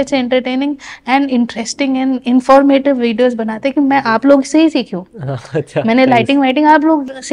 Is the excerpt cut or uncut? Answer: uncut